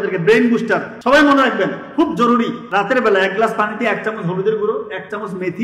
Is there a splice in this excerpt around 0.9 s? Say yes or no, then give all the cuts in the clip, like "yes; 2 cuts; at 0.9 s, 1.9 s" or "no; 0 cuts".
yes; 2 cuts; at 0.9 s, 2.6 s